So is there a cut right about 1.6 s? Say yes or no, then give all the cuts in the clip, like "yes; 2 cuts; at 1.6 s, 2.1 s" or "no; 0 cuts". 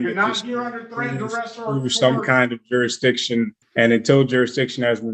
no; 1 cut; at 3.6 s